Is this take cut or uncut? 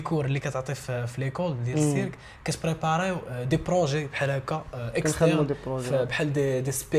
uncut